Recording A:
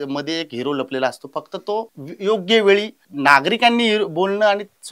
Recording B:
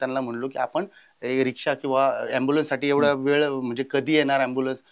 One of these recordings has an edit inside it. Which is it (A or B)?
A